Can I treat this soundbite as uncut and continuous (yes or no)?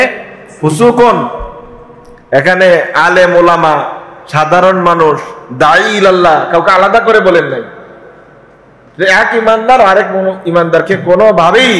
yes